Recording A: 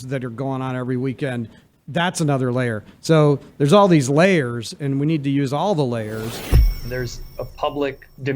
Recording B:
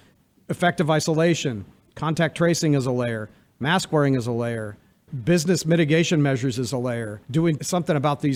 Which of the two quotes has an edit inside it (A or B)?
A